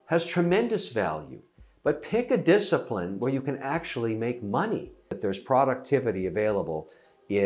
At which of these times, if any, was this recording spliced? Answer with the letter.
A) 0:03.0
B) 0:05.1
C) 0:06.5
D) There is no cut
B